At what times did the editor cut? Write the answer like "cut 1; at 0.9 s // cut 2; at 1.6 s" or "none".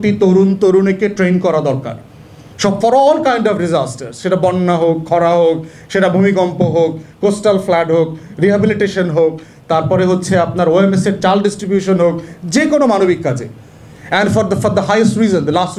none